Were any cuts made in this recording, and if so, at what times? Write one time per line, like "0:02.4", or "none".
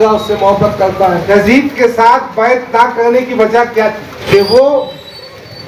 0:01.3
0:04.2